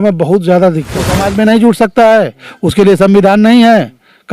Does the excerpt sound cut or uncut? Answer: cut